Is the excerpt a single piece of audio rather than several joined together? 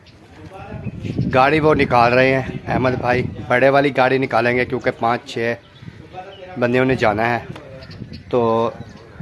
yes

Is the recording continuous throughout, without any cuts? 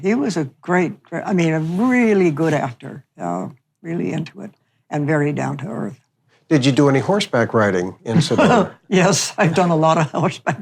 yes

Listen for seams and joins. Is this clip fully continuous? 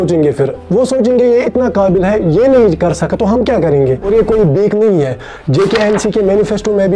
no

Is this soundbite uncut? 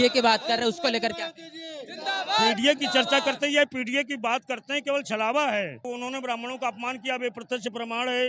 no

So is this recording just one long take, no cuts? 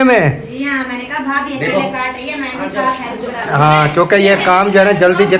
yes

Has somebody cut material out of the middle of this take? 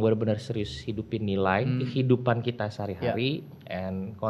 yes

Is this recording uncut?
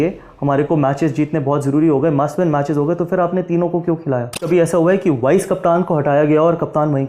yes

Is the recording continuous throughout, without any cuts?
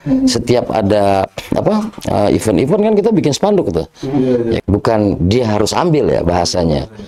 no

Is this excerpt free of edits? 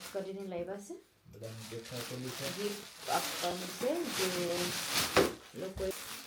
yes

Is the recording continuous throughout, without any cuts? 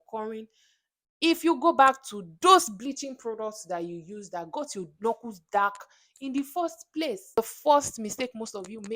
no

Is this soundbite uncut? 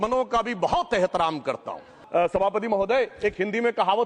no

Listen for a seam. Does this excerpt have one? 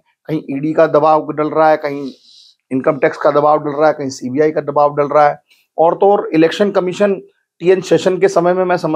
no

